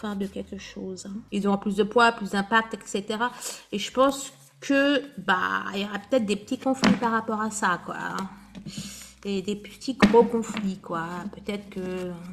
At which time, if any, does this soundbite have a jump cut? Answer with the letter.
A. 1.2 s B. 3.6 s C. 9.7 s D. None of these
A